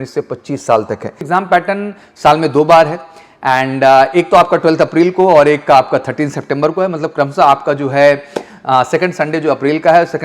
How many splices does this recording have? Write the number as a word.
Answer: one